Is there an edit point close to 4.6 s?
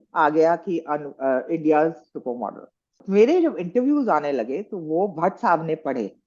no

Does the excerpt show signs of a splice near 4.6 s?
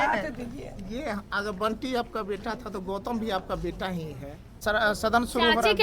yes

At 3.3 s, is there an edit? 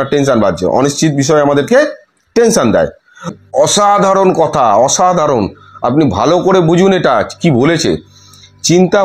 yes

